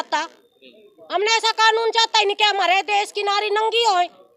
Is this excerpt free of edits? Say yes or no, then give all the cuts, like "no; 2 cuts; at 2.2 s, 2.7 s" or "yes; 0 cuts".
yes; 0 cuts